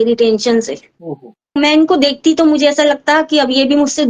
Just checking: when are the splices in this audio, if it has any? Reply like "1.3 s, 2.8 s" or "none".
1.6 s